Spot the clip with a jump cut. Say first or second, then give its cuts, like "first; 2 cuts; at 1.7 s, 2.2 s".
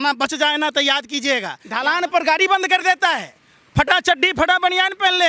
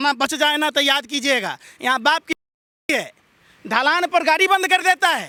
first; 1 cut; at 1.6 s